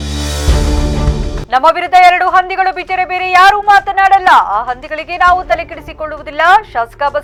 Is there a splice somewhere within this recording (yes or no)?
no